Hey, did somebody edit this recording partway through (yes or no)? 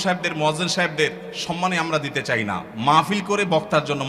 no